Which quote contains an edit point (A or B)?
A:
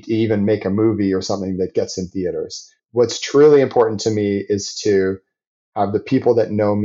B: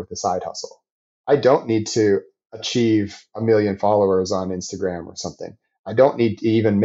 A